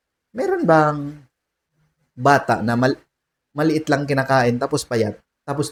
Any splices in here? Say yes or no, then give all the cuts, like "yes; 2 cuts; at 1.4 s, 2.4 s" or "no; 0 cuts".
no; 0 cuts